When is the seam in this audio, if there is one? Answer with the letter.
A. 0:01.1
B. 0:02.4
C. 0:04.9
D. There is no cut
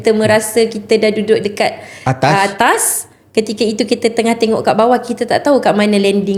D